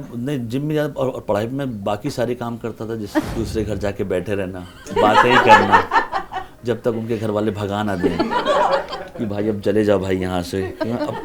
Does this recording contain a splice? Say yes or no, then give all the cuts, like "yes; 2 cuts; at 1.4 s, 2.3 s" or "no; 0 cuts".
yes; 1 cut; at 3.3 s